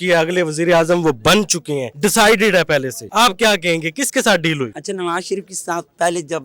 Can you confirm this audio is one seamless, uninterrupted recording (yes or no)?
no